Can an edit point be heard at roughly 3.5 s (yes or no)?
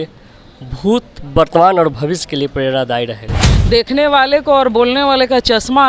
yes